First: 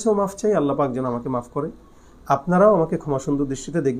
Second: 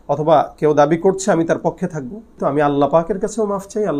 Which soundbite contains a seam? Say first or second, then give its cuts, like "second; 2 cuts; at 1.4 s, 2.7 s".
second; 1 cut; at 2.3 s